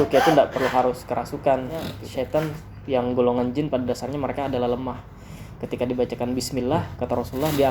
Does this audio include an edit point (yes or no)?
yes